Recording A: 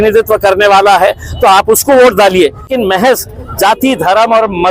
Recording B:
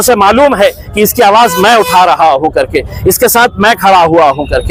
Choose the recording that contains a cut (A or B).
A